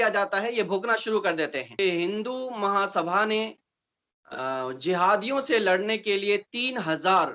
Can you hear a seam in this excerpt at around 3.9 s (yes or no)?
no